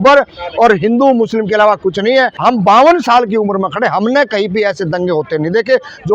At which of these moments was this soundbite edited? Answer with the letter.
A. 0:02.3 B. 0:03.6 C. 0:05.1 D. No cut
A